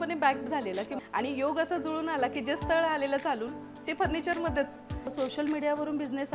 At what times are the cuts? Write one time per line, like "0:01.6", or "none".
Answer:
0:01.0
0:05.1